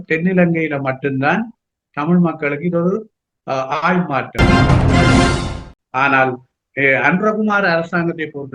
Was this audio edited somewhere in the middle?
yes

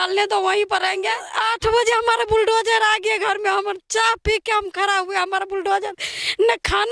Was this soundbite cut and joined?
yes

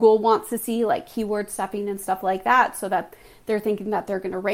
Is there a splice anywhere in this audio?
no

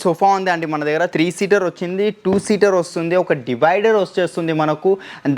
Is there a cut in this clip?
yes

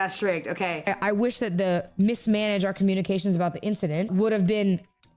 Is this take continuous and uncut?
no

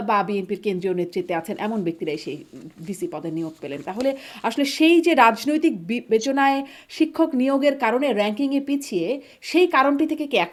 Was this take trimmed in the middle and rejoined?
no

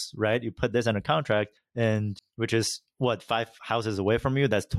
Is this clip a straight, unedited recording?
no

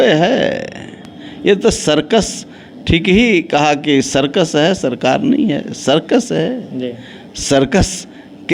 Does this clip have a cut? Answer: no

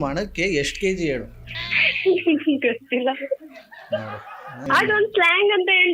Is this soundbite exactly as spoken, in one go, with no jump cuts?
no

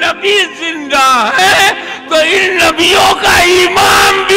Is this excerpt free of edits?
yes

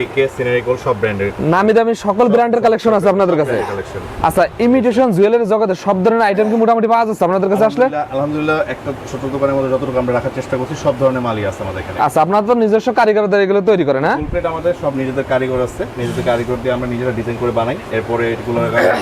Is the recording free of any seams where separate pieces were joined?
yes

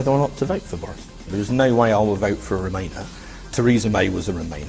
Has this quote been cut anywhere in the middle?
yes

